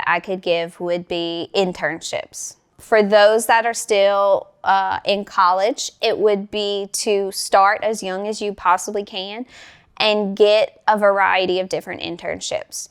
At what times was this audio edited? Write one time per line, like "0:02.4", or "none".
0:02.6